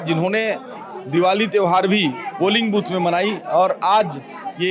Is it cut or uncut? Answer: uncut